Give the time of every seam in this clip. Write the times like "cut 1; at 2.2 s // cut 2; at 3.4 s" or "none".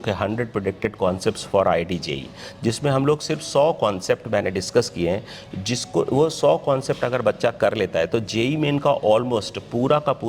none